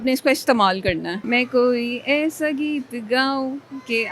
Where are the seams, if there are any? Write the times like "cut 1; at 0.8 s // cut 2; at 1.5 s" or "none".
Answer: cut 1; at 1.1 s